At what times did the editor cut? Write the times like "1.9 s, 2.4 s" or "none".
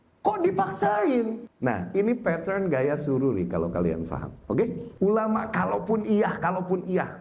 1.5 s, 4.8 s

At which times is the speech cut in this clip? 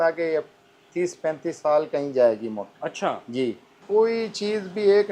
3.8 s

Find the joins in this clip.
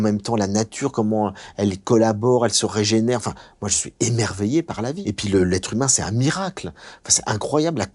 5.0 s

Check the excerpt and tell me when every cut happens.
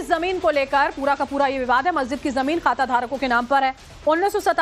1.6 s

